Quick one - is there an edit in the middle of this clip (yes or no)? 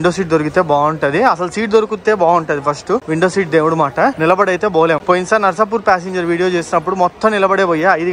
no